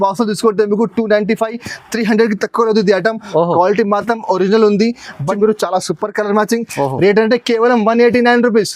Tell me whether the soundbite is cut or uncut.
cut